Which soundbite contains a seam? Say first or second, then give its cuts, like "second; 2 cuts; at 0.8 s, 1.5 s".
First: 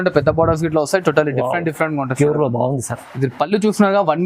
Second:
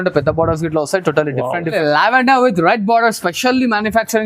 second; 1 cut; at 1.7 s